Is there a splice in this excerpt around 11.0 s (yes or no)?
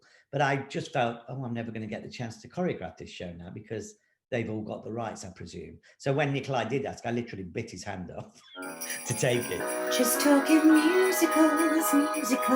no